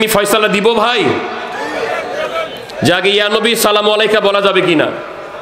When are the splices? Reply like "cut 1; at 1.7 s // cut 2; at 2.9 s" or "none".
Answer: none